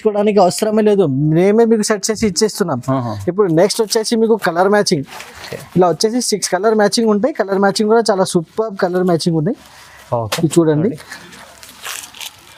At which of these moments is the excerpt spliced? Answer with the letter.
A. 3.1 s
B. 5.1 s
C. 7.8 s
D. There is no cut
D